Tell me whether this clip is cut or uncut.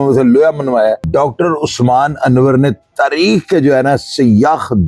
cut